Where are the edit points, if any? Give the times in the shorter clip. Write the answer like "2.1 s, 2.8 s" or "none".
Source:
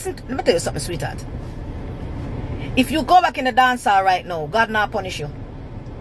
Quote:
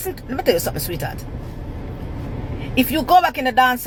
none